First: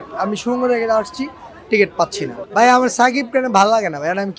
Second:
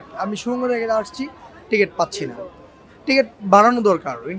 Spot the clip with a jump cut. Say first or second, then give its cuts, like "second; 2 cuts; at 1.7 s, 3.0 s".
first; 1 cut; at 2.3 s